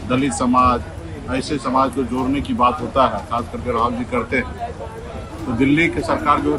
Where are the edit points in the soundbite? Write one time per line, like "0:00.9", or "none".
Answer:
none